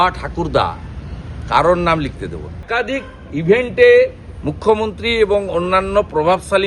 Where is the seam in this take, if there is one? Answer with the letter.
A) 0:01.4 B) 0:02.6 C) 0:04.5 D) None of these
B